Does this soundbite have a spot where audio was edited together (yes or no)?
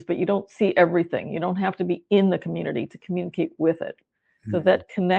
no